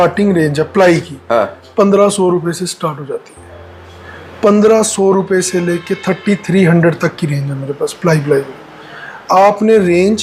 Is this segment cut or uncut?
uncut